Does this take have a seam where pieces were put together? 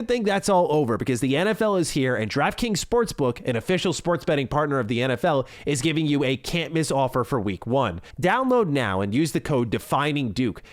yes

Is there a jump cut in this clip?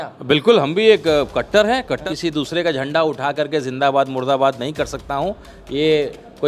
yes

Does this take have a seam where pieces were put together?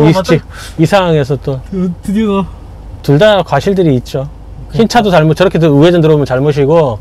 yes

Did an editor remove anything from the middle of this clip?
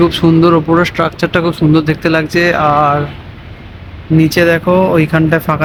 no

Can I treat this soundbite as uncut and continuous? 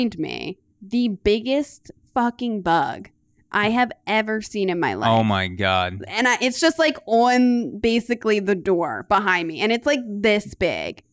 yes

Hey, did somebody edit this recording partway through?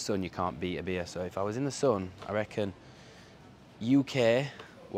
no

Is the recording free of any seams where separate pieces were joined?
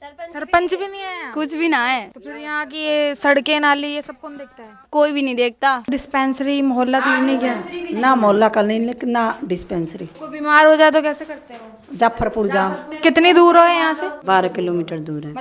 no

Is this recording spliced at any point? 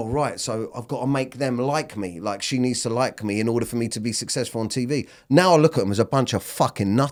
no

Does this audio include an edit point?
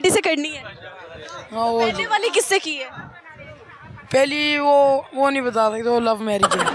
no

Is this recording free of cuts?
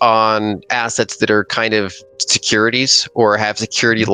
yes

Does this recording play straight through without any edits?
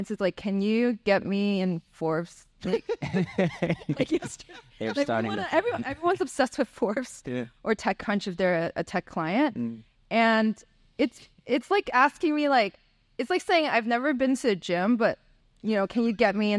yes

